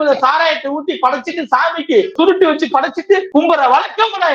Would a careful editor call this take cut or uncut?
cut